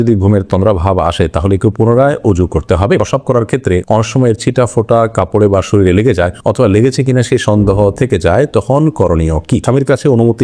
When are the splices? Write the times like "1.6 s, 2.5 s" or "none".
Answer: 3.0 s, 9.6 s

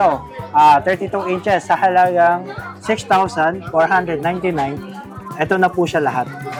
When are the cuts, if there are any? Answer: none

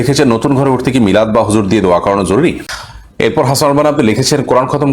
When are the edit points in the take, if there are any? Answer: 2.7 s

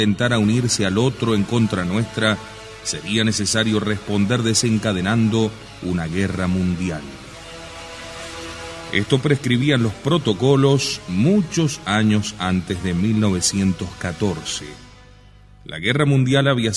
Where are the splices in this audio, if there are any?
none

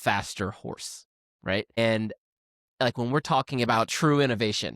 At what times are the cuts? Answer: 1.8 s

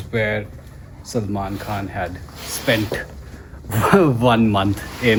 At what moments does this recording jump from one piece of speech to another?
none

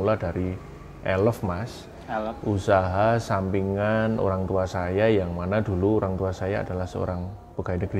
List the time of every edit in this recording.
none

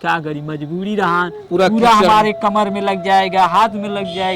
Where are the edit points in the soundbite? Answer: 1.4 s

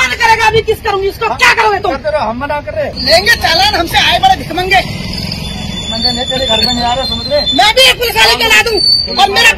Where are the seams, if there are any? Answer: 2.9 s

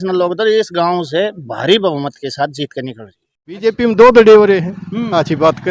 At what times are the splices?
3.7 s

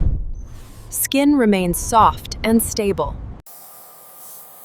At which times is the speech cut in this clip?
3.3 s

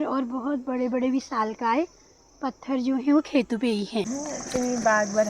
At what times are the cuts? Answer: 4.1 s

